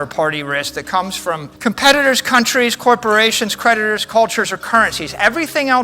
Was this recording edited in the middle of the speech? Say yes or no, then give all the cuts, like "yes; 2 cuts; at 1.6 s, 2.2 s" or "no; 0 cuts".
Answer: yes; 1 cut; at 1.5 s